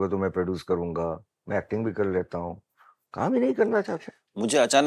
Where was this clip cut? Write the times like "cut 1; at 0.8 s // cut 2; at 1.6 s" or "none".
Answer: none